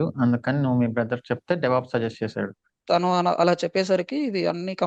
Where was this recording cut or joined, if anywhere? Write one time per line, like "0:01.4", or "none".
0:02.8